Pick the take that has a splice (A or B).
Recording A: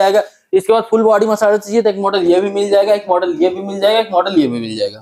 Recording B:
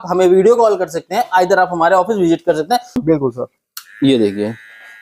B